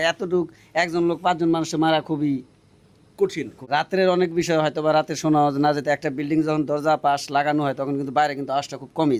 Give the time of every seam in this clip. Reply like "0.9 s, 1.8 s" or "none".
3.6 s